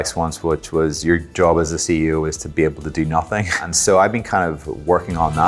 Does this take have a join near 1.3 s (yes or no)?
no